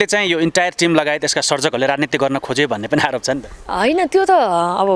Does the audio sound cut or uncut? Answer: uncut